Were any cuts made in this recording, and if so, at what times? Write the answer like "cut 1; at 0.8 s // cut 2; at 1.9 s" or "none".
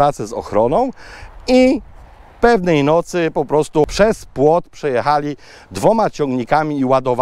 cut 1; at 3.8 s

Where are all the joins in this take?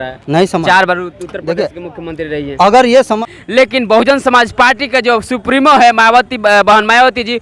cut 1; at 3.2 s

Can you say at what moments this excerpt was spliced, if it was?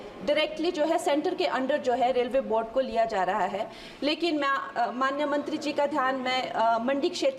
cut 1; at 3.8 s

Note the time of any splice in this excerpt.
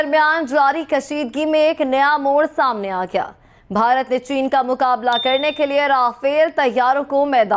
none

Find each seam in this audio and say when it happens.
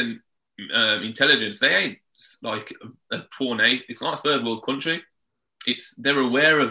none

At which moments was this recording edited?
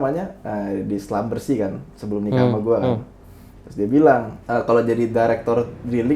cut 1; at 4.4 s

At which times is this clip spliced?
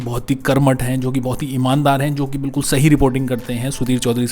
none

